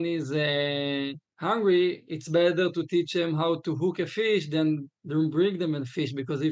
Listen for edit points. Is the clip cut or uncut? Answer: cut